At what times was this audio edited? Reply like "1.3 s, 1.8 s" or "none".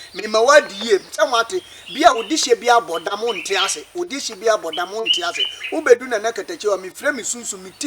none